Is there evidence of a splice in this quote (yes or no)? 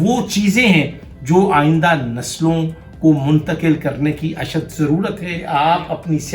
yes